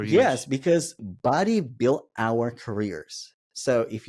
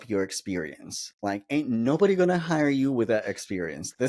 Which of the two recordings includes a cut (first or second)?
first